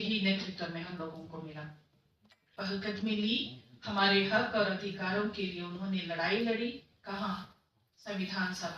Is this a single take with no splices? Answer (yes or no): no